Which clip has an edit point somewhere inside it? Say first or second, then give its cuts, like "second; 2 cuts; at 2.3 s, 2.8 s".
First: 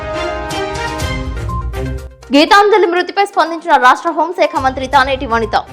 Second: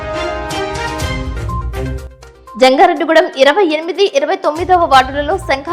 second; 1 cut; at 2.1 s